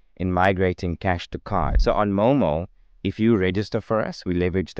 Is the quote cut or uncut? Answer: cut